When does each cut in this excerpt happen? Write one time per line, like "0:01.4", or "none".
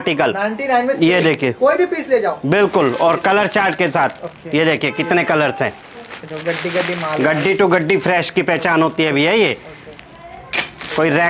none